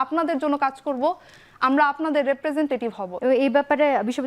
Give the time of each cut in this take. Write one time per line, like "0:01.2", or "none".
0:03.1